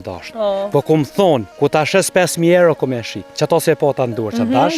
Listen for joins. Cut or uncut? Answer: cut